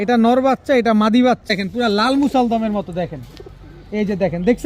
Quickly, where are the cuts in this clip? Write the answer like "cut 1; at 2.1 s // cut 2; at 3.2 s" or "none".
cut 1; at 1.5 s